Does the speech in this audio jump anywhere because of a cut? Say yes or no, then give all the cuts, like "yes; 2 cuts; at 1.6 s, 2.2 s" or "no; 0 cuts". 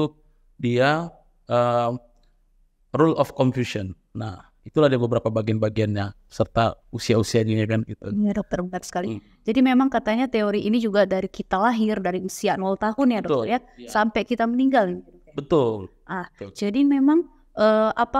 no; 0 cuts